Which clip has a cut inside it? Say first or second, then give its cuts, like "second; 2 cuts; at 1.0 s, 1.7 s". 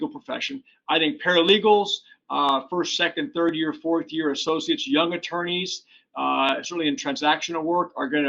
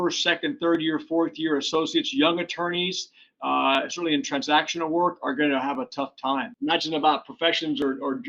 second; 1 cut; at 6.5 s